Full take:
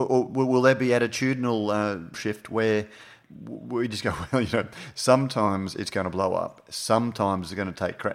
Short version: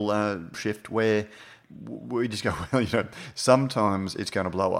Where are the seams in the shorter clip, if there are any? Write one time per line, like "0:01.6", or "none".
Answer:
none

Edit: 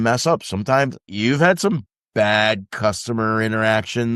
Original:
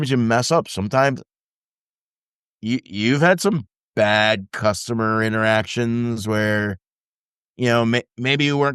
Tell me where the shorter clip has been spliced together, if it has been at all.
0:01.1

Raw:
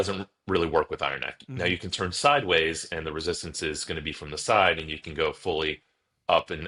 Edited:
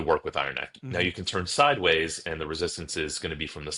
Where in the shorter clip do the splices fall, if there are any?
none

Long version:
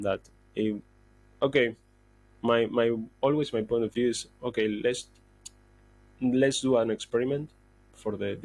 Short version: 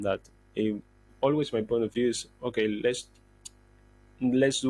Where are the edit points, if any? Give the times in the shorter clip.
0:01.1

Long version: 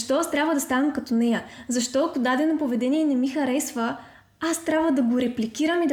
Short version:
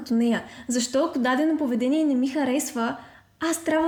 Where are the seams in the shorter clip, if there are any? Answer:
none

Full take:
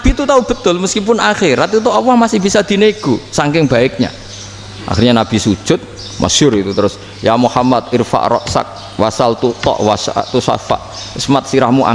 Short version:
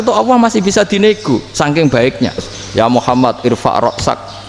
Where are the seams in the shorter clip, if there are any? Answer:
0:02.6

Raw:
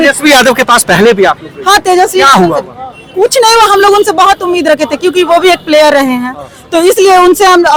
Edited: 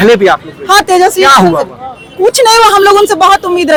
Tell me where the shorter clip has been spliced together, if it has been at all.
none

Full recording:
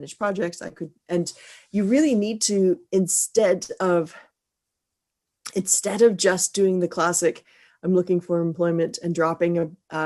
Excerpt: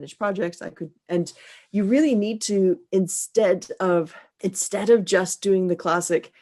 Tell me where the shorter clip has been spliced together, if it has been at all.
0:04.2

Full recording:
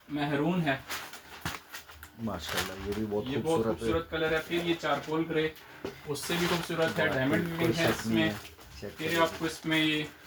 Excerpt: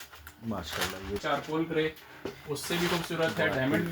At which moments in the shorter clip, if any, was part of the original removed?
0:01.2

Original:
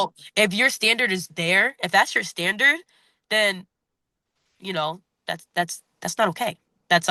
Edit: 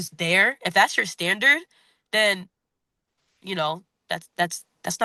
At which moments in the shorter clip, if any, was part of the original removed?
none

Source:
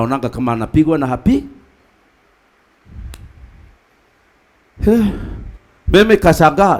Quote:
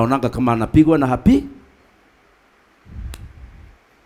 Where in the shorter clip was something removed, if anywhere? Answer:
none

